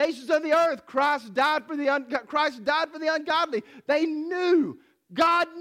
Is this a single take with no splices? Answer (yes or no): yes